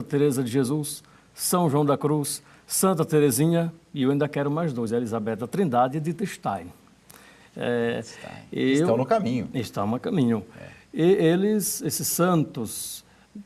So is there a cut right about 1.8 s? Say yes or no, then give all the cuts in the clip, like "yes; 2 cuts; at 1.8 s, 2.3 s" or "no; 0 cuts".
yes; 1 cut; at 1.8 s